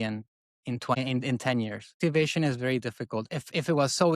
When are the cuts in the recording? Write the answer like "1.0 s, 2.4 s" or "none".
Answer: 1.0 s, 1.9 s

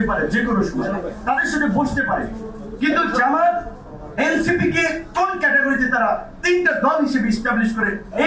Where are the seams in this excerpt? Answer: none

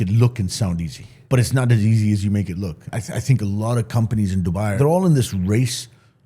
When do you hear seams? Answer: 1.1 s, 2.8 s, 4.7 s

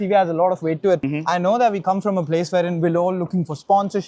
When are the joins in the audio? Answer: 1.1 s

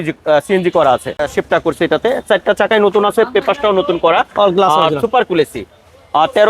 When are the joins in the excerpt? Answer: 1.2 s

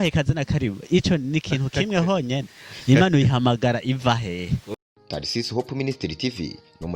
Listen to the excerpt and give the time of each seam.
4.7 s

